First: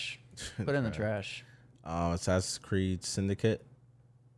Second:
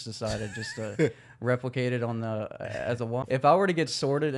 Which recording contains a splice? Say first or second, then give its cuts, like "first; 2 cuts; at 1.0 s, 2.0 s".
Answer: second; 1 cut; at 3.2 s